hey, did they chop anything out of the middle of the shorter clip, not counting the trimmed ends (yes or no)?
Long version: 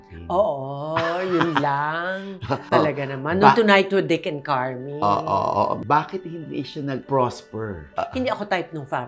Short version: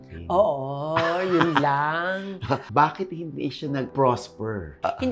yes